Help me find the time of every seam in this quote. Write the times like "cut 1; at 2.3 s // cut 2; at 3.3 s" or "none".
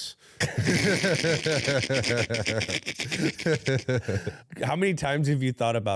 cut 1; at 4.3 s